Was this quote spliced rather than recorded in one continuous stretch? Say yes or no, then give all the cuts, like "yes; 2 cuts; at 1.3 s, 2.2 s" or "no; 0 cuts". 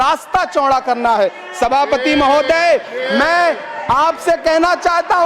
no; 0 cuts